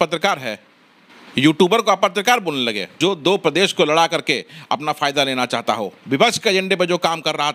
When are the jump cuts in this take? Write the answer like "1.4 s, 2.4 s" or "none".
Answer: 2.8 s